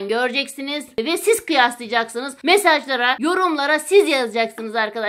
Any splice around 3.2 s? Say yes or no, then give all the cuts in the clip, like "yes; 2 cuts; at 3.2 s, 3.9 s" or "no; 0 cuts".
yes; 3 cuts; at 1.0 s, 2.3 s, 3.2 s